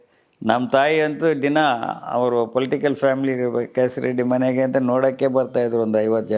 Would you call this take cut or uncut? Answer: uncut